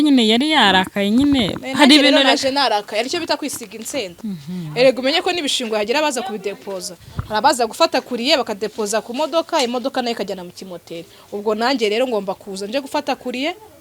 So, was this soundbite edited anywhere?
yes; 1 cut; at 4.1 s

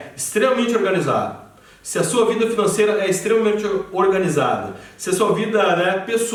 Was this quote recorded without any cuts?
yes; 0 cuts

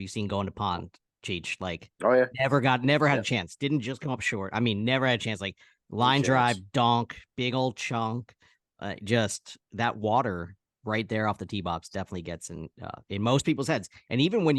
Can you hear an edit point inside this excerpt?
no; 0 cuts

